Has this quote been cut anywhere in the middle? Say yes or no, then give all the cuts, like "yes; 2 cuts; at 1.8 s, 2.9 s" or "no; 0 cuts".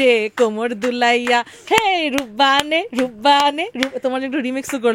no; 0 cuts